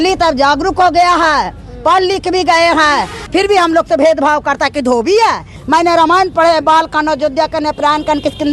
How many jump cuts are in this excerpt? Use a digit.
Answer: 2